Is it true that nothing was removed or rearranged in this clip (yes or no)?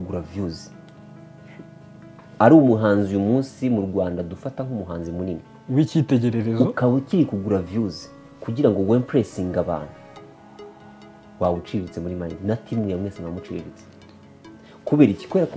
yes